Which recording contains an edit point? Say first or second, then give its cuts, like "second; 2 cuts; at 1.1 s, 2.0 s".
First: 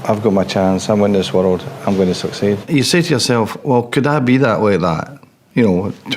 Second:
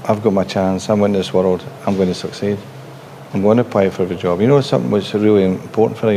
first; 1 cut; at 2.6 s